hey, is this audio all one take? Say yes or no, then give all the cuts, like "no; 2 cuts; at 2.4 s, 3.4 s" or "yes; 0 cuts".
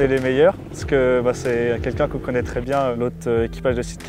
yes; 0 cuts